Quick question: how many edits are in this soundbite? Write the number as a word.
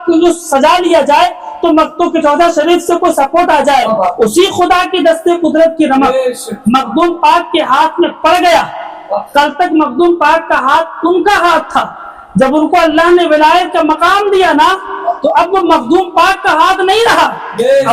one